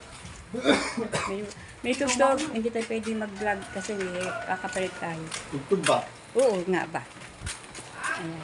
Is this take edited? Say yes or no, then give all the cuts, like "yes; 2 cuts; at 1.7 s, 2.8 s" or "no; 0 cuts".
no; 0 cuts